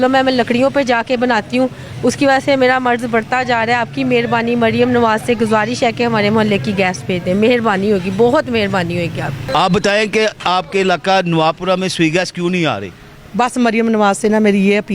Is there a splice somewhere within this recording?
no; 0 cuts

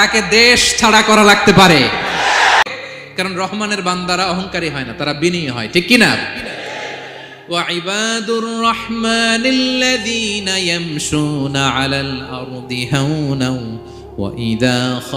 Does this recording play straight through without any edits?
no; 1 cut; at 2.6 s

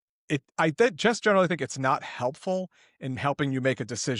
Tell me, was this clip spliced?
no; 0 cuts

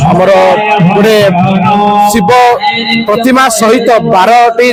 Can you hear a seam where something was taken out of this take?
no; 0 cuts

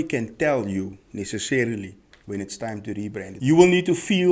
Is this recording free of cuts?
no; 1 cut; at 3.3 s

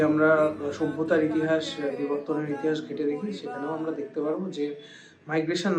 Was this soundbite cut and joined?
no; 0 cuts

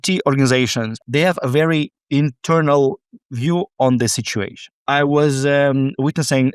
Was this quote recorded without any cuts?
no; 2 cuts; at 0.9 s, 4.8 s

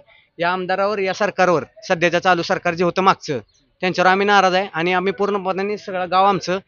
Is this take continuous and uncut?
yes; 0 cuts

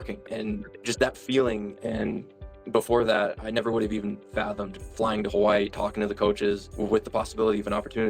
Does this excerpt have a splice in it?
yes; 1 cut; at 1.7 s

